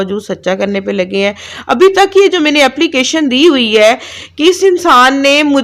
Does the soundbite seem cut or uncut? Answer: uncut